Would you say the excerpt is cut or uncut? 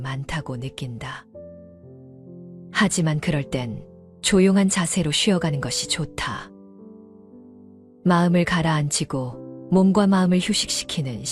cut